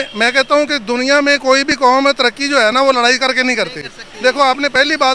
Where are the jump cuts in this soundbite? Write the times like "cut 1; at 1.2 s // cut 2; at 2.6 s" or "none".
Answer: none